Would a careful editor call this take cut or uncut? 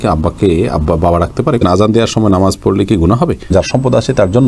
cut